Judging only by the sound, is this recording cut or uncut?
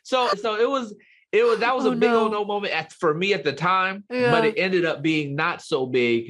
uncut